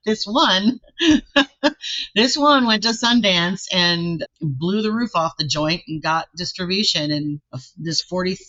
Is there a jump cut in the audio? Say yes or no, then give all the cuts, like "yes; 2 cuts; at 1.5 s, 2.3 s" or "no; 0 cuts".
no; 0 cuts